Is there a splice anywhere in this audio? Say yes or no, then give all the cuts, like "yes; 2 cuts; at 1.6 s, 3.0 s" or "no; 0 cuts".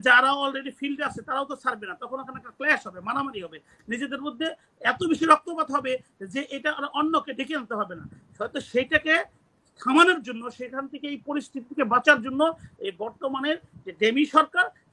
no; 0 cuts